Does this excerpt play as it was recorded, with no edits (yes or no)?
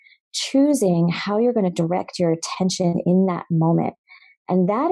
yes